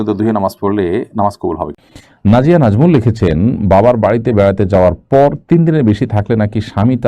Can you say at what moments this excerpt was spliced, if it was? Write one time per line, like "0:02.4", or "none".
0:01.8